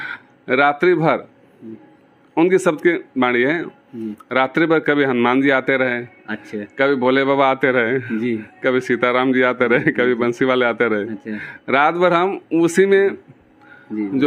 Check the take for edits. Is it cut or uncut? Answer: uncut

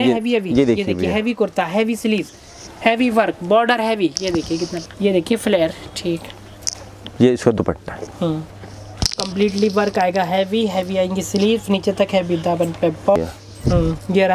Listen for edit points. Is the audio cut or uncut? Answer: cut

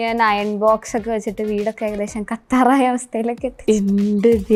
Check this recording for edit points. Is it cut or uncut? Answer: uncut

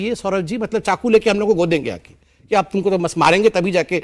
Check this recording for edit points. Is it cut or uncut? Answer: uncut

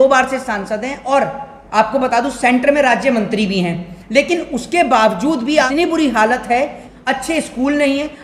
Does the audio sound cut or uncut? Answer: cut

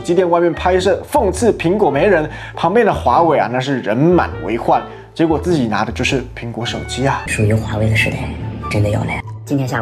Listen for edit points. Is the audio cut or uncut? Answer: cut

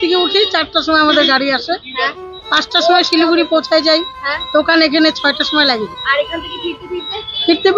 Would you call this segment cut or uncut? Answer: uncut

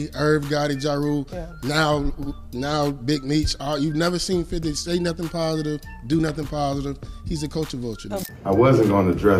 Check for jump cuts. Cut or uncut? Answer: cut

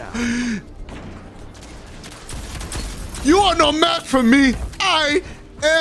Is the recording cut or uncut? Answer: cut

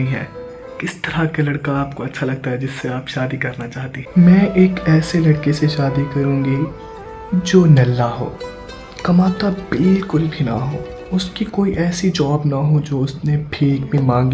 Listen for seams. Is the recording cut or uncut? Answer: uncut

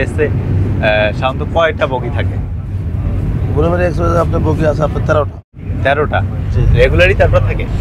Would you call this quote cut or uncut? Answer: uncut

